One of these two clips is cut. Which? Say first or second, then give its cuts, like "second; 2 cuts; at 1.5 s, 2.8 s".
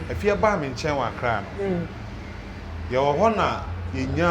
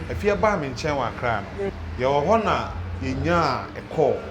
second; 1 cut; at 1.7 s